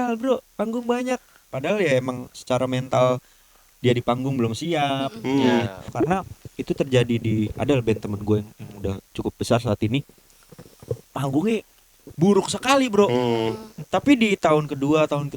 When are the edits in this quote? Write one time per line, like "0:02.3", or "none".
0:05.9